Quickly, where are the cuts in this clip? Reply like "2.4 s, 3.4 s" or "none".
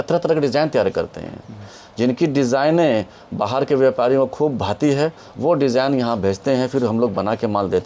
none